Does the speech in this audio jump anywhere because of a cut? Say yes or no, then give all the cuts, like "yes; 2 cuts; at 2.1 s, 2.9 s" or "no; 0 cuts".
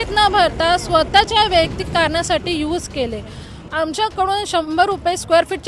yes; 1 cut; at 3.6 s